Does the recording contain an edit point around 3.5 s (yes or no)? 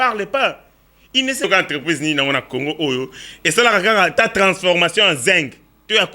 no